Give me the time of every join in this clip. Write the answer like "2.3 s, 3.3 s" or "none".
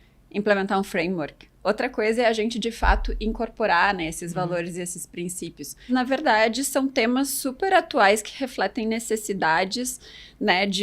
5.9 s